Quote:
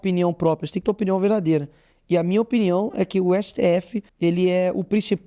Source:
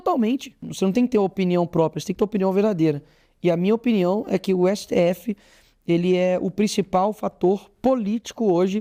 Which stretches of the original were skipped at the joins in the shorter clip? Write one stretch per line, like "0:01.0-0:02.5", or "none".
0:05.3-0:05.7